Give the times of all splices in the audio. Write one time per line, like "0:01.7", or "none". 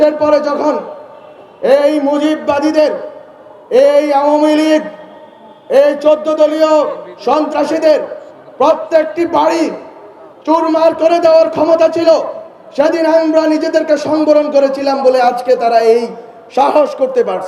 none